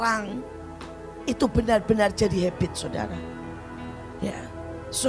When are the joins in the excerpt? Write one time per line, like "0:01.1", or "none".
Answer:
none